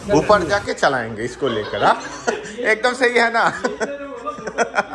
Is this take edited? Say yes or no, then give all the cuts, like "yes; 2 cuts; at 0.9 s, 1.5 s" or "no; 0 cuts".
no; 0 cuts